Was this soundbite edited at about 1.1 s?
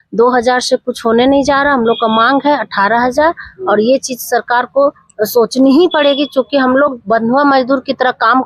no; 0 cuts

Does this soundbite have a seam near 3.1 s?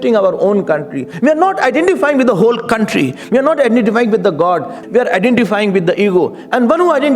no; 2 cuts; at 1.1 s, 4.8 s

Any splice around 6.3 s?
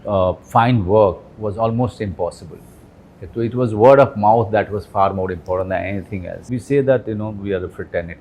yes; 1 cut; at 6.3 s

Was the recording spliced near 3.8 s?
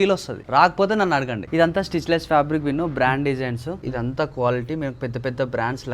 yes; 1 cut; at 3.8 s

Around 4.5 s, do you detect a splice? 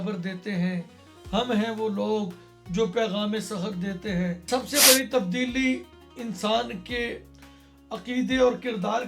yes; 1 cut; at 4.5 s

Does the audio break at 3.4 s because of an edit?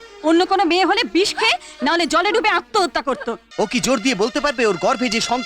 yes; 1 cut; at 3.4 s

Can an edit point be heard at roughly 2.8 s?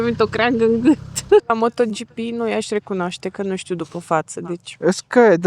no; 1 cut; at 1.5 s

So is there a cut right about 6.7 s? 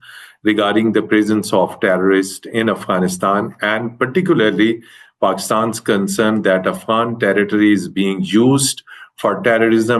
no; 0 cuts

